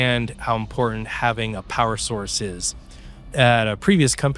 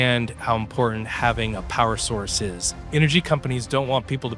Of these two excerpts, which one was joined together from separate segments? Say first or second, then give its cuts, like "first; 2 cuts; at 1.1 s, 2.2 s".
second; 1 cut; at 2.8 s